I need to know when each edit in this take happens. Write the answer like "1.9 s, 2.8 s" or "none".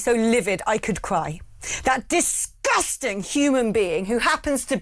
none

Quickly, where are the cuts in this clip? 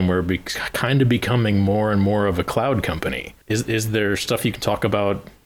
3.3 s

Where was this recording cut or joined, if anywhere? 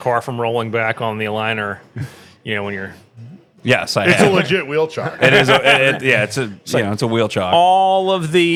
none

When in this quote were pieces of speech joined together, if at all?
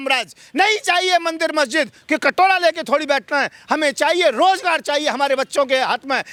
none

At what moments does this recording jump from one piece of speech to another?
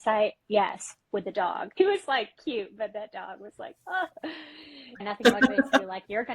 1.8 s, 5.1 s

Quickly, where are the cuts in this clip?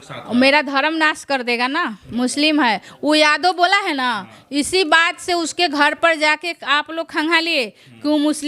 none

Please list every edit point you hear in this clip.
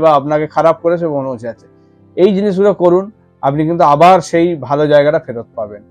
none

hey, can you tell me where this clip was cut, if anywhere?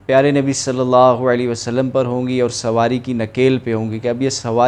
none

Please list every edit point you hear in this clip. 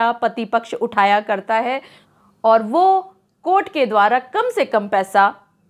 2.0 s

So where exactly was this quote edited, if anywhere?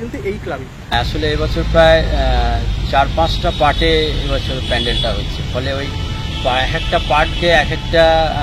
0.9 s

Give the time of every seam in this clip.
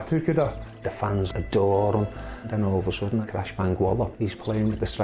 1.1 s, 2.5 s, 4.1 s

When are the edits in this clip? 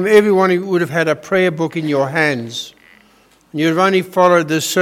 none

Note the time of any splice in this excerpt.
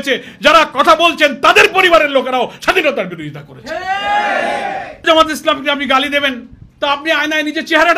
5.0 s

